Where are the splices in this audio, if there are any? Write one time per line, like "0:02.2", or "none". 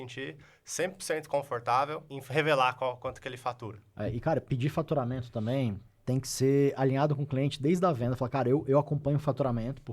0:02.1
0:03.9
0:05.9